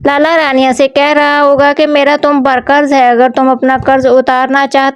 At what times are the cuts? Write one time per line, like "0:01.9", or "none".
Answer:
0:01.1